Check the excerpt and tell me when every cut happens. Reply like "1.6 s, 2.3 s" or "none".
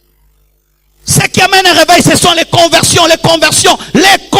none

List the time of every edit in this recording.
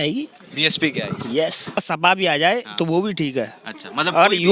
1.8 s

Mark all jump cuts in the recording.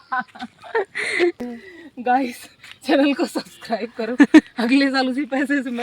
1.5 s

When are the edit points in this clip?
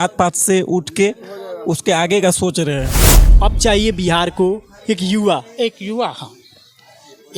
3.1 s

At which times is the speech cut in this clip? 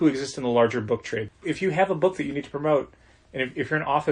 1.3 s

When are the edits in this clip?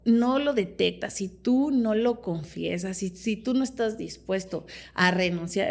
none

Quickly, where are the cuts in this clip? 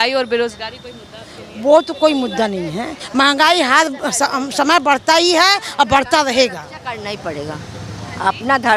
none

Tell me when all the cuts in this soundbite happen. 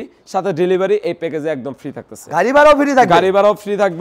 none

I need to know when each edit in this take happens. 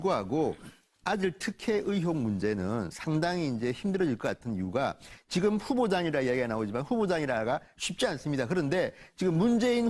6.0 s

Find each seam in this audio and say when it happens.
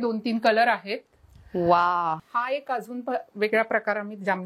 2.2 s

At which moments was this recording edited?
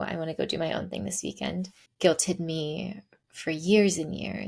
1.8 s

